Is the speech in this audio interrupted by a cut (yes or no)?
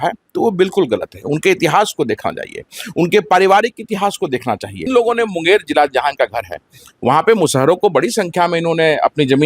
yes